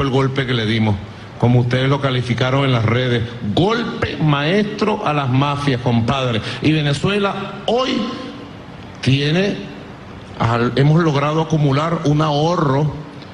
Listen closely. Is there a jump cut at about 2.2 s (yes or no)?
yes